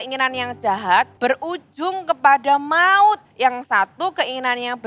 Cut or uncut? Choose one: cut